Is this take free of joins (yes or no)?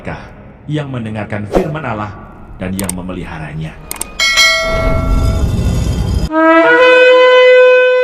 yes